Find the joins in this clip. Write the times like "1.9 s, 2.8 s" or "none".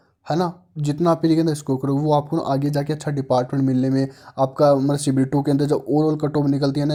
none